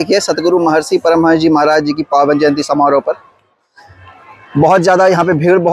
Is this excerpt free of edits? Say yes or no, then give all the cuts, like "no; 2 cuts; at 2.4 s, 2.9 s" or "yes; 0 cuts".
yes; 0 cuts